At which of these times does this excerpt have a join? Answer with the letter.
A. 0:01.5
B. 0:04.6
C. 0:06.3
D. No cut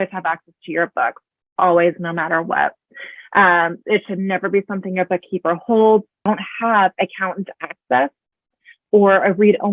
C